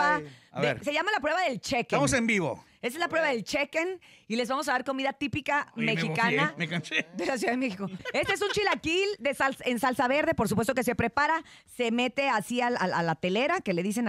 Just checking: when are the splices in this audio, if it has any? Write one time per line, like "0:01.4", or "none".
0:08.0